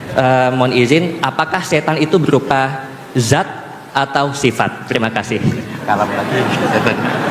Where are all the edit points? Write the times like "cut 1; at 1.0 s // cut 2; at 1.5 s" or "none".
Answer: none